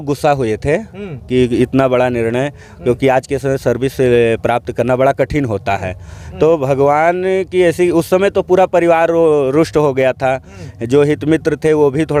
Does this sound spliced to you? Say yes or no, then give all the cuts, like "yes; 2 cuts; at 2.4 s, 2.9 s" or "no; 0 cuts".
no; 0 cuts